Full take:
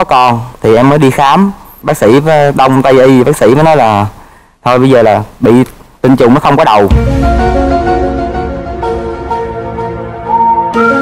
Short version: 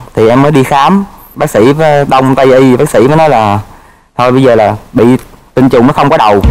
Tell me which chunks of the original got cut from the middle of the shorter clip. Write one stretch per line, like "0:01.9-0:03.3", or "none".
none